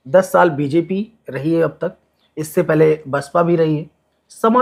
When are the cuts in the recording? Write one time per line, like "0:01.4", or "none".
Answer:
none